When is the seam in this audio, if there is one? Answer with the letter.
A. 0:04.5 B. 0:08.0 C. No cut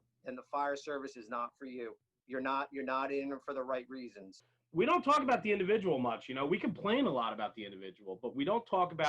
A